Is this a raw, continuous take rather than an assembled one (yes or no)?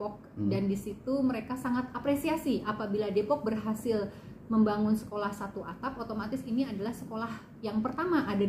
yes